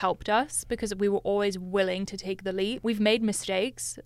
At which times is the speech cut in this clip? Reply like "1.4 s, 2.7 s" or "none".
2.8 s